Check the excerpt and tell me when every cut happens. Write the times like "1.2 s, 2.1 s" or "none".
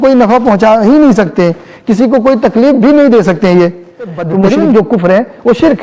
4.5 s